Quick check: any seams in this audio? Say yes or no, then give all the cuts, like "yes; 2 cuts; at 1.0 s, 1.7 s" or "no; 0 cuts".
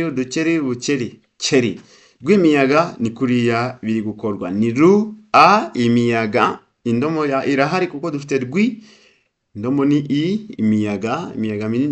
no; 0 cuts